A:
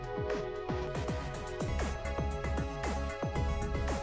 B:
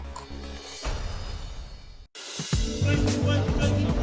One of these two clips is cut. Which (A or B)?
B